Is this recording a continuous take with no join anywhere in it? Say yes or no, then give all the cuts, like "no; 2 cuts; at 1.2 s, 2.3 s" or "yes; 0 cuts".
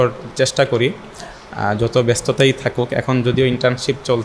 yes; 0 cuts